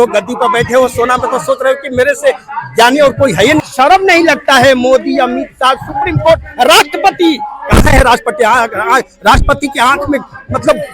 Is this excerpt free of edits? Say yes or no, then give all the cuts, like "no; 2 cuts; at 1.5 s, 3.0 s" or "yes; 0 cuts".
no; 1 cut; at 3.6 s